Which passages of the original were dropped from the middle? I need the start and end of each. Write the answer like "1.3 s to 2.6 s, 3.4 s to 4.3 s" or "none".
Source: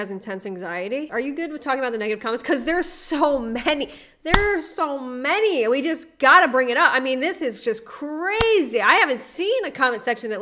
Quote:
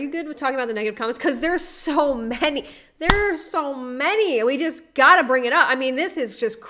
none